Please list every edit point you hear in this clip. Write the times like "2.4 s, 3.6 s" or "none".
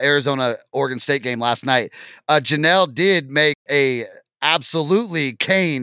none